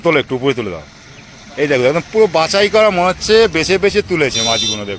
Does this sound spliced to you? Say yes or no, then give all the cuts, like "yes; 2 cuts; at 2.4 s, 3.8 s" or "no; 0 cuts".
no; 0 cuts